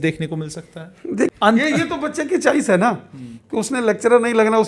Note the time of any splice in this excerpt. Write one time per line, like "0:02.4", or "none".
0:01.3